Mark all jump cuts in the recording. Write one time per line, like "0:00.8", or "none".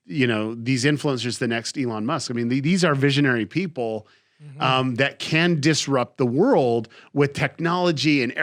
none